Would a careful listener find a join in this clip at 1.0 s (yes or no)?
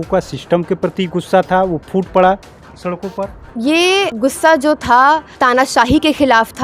no